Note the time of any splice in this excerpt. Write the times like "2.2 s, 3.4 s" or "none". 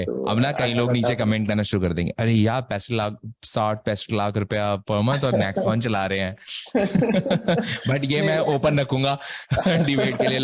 none